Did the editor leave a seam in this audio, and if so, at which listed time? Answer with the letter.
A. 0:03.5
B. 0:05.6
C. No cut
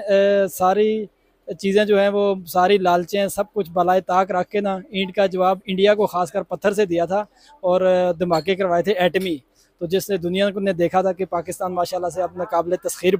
C